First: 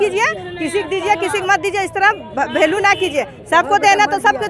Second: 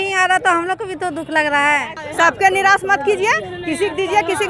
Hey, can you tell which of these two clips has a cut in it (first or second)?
second